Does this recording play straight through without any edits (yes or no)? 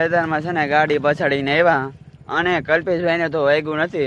yes